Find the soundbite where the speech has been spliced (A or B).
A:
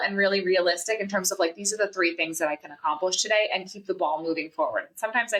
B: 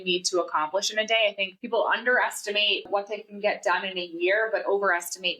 B